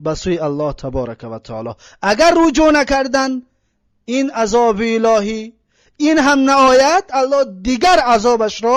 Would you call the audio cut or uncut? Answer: uncut